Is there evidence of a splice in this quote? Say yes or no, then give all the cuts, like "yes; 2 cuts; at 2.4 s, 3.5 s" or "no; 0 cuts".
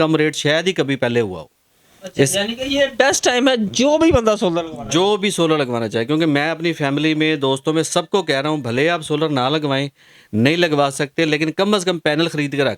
no; 0 cuts